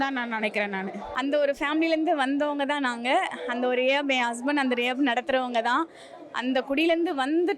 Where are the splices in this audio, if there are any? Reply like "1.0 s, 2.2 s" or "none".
1.0 s

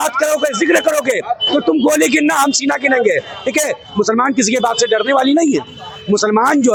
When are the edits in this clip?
none

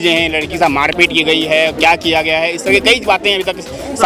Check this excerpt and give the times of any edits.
none

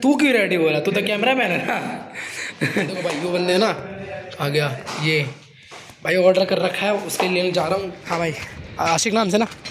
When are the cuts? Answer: 3.0 s, 8.0 s

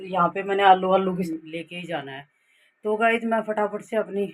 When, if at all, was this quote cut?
1.3 s

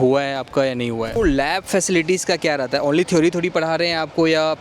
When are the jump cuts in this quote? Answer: 1.2 s

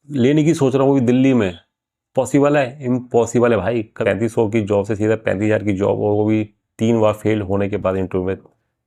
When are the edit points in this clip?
3.9 s

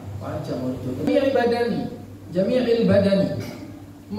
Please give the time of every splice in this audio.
1.1 s

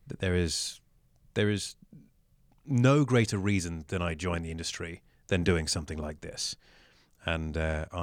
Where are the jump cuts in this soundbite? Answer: none

